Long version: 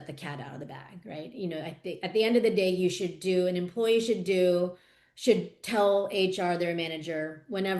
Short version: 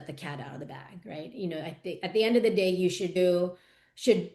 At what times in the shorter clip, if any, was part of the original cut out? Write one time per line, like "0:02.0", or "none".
0:03.2